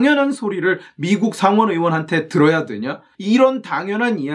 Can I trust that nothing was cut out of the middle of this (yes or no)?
no